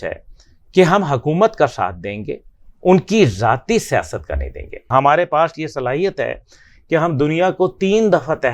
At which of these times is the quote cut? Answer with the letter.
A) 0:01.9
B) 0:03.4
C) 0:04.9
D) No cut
C